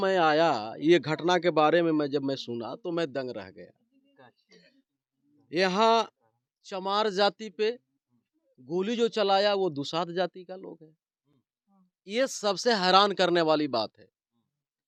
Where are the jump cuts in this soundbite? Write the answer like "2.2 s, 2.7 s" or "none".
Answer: none